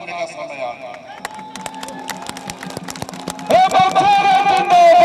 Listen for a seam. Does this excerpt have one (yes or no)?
no